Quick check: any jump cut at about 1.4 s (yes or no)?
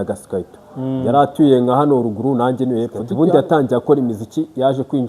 no